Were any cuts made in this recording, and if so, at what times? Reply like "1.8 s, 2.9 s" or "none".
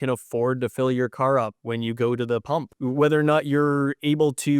1.6 s, 2.7 s